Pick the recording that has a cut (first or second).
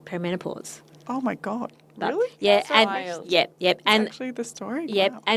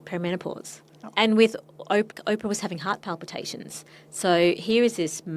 second